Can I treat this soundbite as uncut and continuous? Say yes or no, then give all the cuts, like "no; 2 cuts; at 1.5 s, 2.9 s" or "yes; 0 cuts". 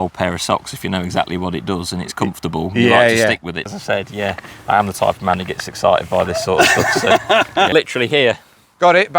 no; 2 cuts; at 3.7 s, 7.7 s